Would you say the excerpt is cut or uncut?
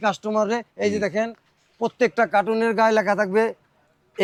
uncut